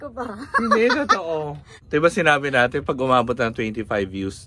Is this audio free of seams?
no; 1 cut; at 1.7 s

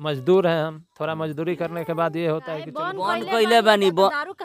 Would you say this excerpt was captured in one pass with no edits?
no; 1 cut; at 2.9 s

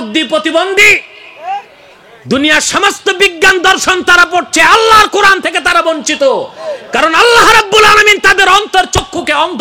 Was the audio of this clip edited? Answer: no; 0 cuts

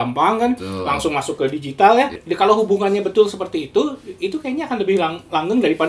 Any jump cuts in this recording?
yes; 1 cut; at 2.2 s

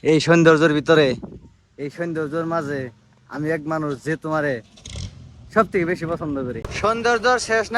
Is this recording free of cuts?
no; 1 cut; at 6.7 s

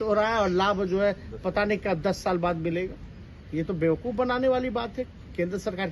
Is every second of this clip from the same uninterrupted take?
yes; 0 cuts

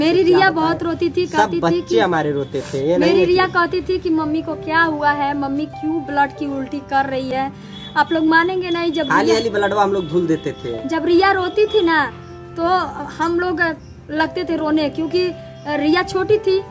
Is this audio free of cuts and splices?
yes; 0 cuts

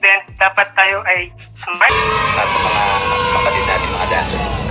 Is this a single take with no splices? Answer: no; 1 cut; at 1.9 s

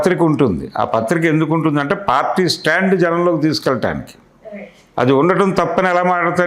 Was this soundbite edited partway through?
no; 0 cuts

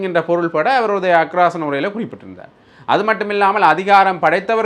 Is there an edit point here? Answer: no; 0 cuts

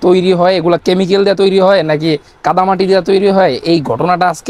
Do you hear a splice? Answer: no; 0 cuts

